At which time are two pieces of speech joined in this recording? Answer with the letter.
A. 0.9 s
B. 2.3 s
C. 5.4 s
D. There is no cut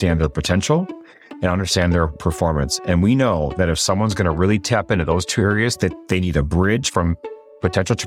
D